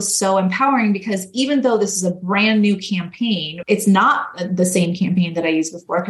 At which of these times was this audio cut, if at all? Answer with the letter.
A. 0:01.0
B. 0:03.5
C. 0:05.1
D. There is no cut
B